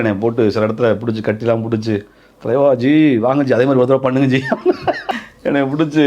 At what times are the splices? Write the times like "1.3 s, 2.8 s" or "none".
5.1 s